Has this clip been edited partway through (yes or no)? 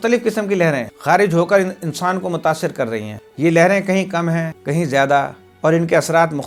no